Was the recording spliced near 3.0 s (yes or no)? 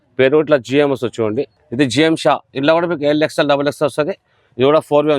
no